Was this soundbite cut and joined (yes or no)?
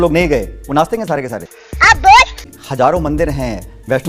yes